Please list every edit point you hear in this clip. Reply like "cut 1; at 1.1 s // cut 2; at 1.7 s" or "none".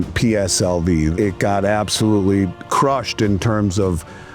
cut 1; at 1.1 s // cut 2; at 2.6 s

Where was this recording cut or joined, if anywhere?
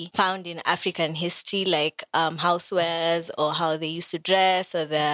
none

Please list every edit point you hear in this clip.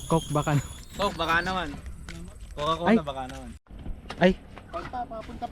cut 1; at 3.7 s

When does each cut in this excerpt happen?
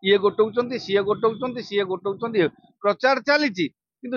cut 1; at 2.7 s

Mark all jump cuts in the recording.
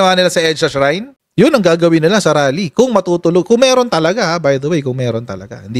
cut 1; at 1.2 s

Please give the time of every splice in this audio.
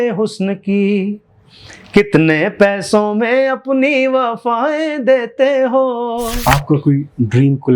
cut 1; at 6.3 s

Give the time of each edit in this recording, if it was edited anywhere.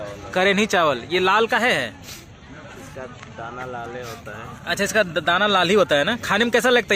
none

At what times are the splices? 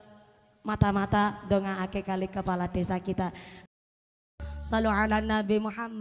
cut 1; at 3.7 s

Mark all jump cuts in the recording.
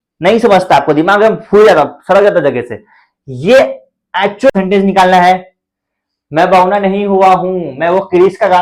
cut 1; at 4.5 s

